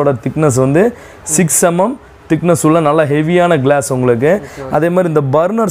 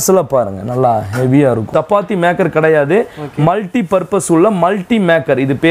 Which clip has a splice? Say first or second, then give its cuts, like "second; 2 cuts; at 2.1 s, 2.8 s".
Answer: second; 1 cut; at 1.7 s